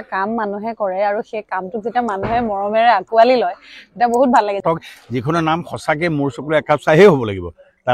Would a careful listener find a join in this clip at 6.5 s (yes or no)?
no